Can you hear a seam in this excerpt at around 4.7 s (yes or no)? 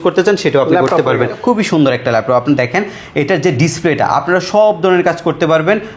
no